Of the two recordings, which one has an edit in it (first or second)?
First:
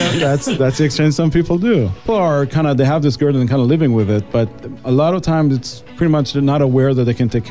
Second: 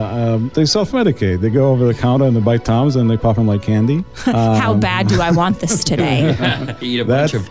first